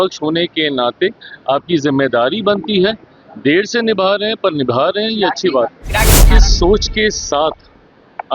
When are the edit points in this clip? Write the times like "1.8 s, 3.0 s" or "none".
6.3 s